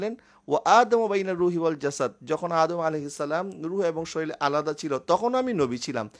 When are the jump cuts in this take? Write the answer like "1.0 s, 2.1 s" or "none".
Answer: none